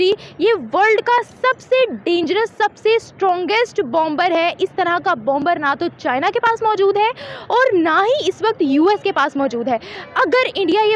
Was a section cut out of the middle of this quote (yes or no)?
no